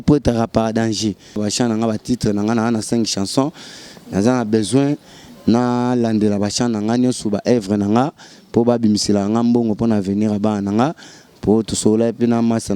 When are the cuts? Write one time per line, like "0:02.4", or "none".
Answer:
0:01.4